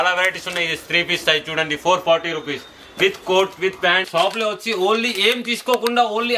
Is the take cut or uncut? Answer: cut